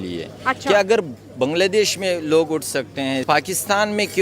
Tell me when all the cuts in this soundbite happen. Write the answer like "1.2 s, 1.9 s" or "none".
3.2 s